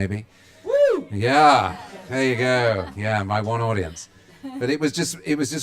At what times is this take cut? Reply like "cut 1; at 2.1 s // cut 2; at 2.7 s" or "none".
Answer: cut 1; at 4.5 s